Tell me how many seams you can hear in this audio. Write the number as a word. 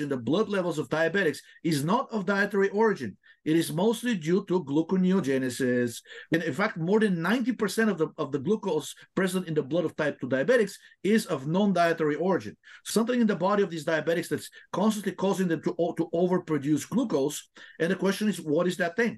two